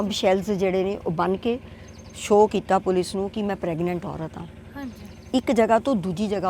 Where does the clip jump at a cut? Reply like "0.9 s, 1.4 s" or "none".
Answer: none